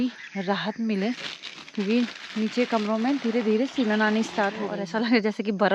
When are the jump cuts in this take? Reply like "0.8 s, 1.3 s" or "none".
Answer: 4.7 s